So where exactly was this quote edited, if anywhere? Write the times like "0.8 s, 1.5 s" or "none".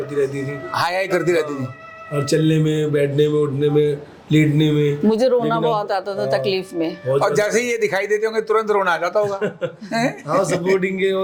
none